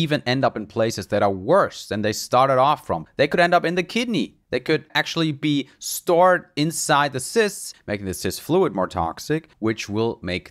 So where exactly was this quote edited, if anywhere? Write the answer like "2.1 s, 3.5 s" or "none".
3.0 s, 4.9 s, 7.7 s, 9.5 s